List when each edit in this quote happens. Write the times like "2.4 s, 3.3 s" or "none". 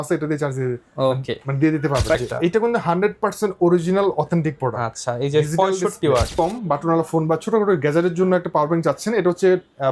2.2 s, 6.3 s